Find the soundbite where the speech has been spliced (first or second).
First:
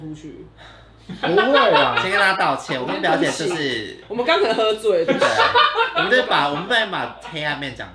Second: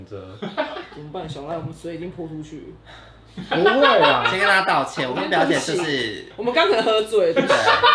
second